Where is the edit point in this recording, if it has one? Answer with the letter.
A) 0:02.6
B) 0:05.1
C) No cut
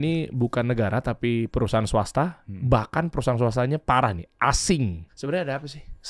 B